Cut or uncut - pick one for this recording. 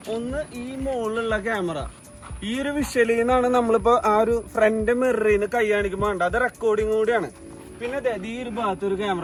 uncut